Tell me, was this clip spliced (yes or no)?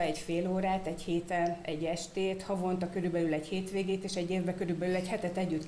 no